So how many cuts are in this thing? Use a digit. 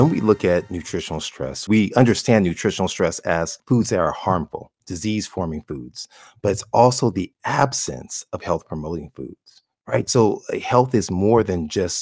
3